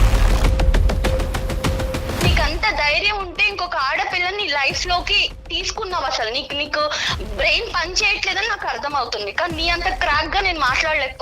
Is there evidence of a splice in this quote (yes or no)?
yes